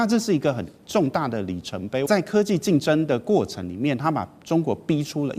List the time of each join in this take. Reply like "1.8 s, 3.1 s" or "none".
2.0 s